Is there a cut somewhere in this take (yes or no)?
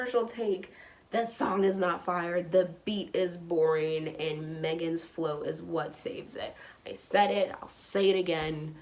no